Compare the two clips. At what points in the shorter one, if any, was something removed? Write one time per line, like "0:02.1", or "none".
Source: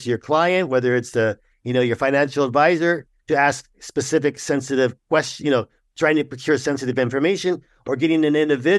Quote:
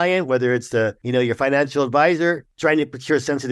0:01.0
0:02.5